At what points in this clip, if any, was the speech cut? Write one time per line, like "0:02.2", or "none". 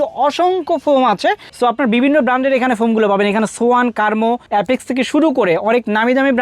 none

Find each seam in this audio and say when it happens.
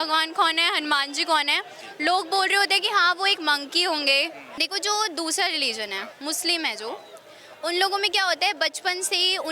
0:04.5

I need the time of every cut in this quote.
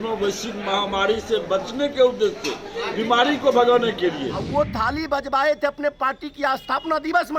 0:04.3

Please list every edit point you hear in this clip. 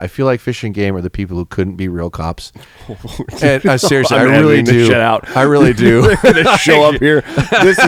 none

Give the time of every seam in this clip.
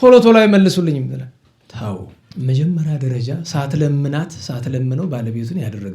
0:02.2

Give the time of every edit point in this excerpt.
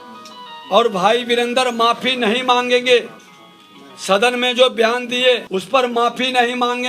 0:05.4

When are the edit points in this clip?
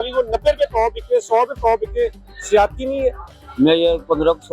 0:03.3

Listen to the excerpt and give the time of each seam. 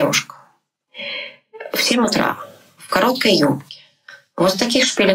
none

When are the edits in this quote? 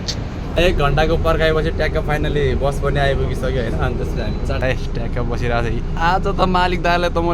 0:04.6

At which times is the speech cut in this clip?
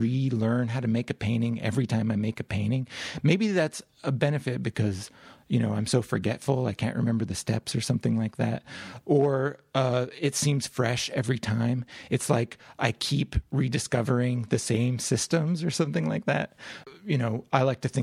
0:16.8

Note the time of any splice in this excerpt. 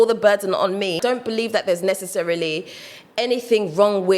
0:01.0

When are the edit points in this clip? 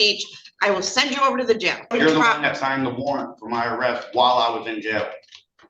0:01.9

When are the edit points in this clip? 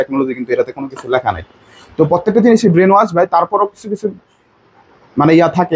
none

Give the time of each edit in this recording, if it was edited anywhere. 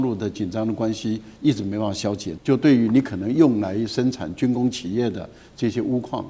none

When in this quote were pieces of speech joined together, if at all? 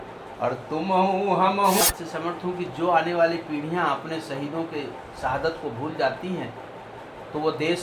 0:01.8

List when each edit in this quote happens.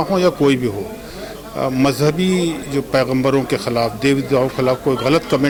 none

